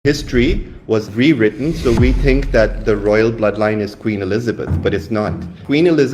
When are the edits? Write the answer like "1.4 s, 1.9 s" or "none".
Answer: 1.1 s